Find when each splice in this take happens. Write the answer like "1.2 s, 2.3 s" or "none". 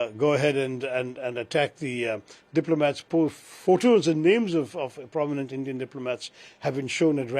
none